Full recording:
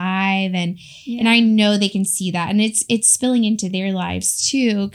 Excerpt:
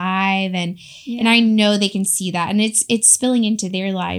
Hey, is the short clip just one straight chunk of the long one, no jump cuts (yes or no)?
yes